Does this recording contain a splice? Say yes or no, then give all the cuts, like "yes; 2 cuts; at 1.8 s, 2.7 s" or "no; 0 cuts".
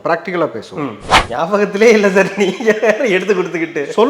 yes; 1 cut; at 1.2 s